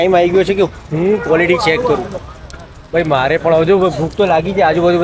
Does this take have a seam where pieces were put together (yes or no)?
no